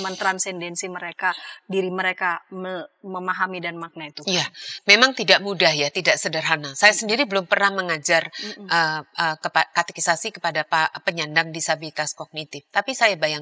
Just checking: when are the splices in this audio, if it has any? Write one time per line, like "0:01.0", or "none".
none

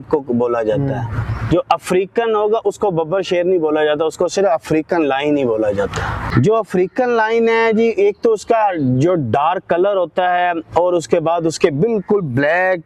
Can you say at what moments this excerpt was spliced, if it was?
0:06.2

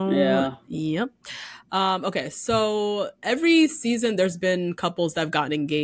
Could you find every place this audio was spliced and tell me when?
none

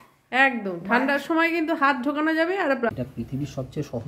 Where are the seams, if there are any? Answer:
0:02.9

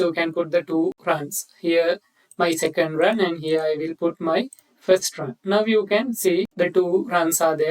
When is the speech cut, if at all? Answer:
0:01.0
0:06.5

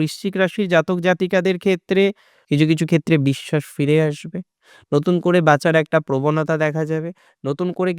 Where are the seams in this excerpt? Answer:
0:02.3

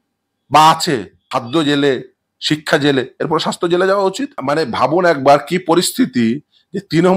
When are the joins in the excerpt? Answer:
0:01.2
0:04.4

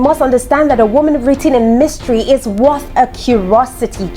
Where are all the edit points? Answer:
none

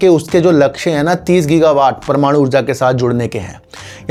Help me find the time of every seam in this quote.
none

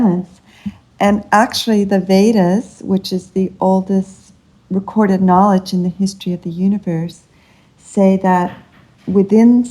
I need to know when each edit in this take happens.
0:04.6

